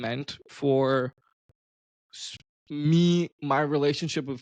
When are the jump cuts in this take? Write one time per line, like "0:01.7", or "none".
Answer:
none